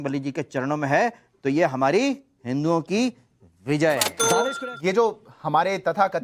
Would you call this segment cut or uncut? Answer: uncut